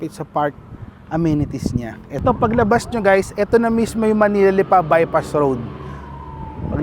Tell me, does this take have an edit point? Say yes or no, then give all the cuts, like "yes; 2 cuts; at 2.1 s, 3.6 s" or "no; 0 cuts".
yes; 1 cut; at 2.1 s